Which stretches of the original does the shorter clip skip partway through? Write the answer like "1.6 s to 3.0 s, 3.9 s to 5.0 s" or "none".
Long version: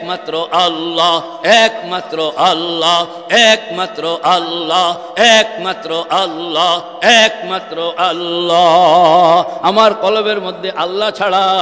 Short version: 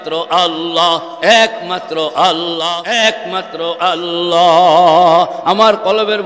3.0 s to 7.0 s